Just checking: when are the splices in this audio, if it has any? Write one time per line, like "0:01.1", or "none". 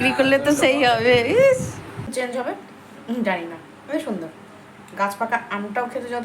0:02.1